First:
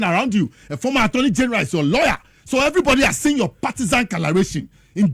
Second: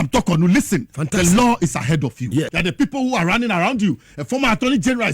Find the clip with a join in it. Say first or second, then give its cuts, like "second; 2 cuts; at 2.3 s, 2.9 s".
second; 1 cut; at 2.5 s